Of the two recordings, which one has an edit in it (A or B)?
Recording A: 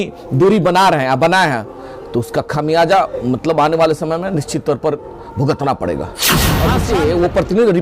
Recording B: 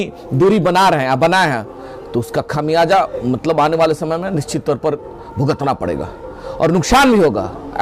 A